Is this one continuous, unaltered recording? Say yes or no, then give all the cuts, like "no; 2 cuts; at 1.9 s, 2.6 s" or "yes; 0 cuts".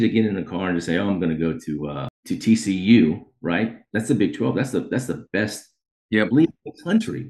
no; 1 cut; at 2.1 s